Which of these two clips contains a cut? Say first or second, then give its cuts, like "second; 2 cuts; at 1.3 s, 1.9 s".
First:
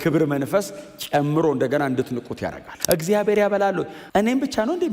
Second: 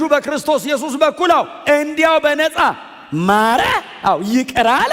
first; 2 cuts; at 2.7 s, 4.0 s